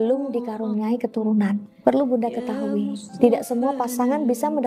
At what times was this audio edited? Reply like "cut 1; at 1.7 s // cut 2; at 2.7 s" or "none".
none

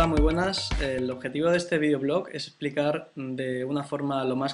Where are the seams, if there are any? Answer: cut 1; at 2.9 s

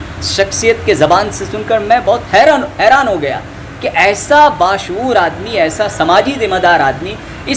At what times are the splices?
none

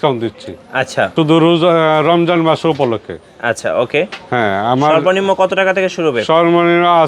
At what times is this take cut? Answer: cut 1; at 1.1 s

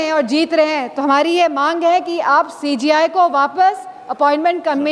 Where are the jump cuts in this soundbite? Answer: none

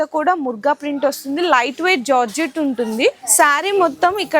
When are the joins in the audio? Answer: cut 1; at 3.2 s

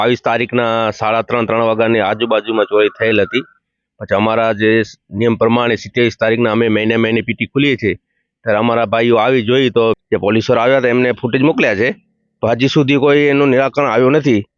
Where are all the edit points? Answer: cut 1; at 10.0 s

